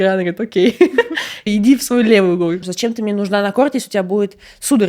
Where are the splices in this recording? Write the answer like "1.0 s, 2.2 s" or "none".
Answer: 1.5 s, 2.7 s